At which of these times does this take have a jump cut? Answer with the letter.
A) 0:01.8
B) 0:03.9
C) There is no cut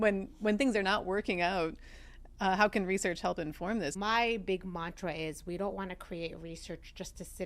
B